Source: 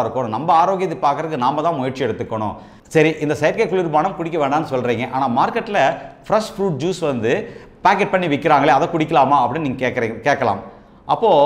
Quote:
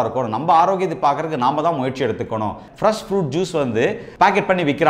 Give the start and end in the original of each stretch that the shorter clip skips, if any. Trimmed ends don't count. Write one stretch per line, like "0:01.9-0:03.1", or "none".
0:02.6-0:06.1
0:07.5-0:07.7